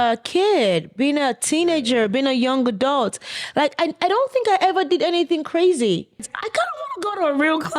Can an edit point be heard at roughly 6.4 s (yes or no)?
yes